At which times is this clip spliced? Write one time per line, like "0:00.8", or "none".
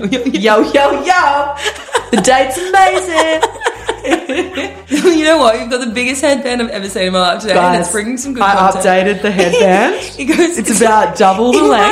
0:04.7